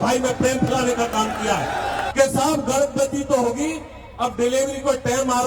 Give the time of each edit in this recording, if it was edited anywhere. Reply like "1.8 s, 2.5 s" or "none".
2.0 s